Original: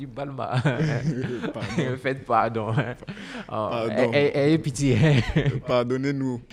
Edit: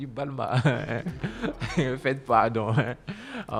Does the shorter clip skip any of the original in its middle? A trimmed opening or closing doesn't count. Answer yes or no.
no